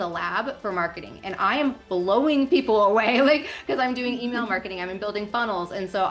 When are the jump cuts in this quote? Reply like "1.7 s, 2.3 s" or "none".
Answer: none